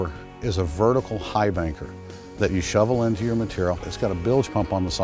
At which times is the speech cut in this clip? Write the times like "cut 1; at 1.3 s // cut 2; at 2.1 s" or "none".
cut 1; at 3.9 s